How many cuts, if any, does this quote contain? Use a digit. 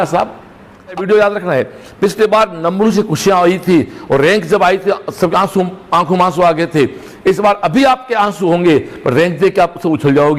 1